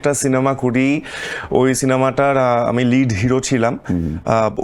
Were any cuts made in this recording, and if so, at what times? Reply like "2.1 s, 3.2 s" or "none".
none